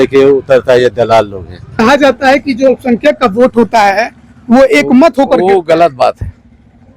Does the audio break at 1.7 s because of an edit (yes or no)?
yes